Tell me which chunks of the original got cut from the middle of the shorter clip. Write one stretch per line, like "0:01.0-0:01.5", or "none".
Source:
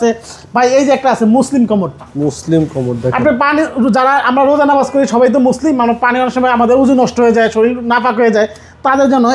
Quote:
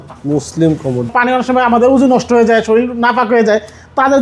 0:03.0-0:06.0